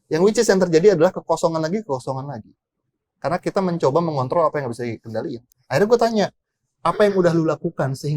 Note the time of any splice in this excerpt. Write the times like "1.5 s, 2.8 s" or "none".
5.5 s

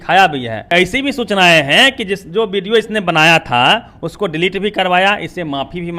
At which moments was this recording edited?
0.9 s

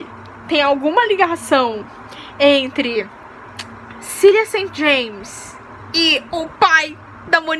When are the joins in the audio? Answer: none

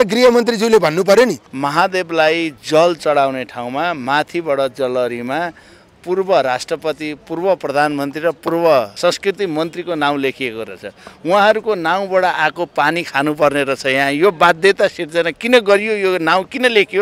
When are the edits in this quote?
1.5 s, 8.9 s

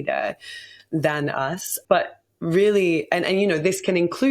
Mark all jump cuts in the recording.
1.7 s

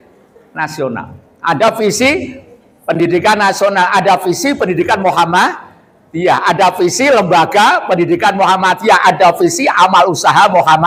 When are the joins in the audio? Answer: none

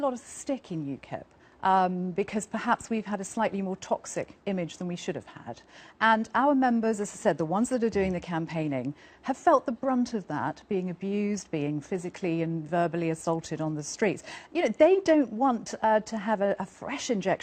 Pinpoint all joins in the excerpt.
none

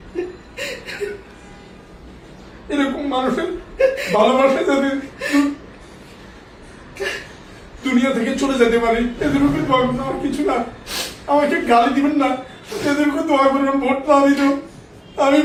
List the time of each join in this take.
none

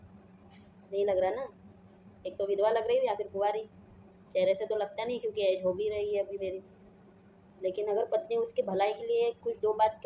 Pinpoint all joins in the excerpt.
none

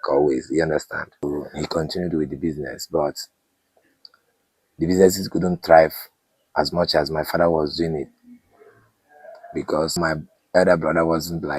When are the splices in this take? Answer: 1.2 s, 9.9 s

